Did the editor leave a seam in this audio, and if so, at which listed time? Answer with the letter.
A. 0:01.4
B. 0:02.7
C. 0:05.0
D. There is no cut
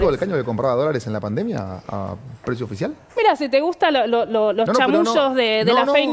D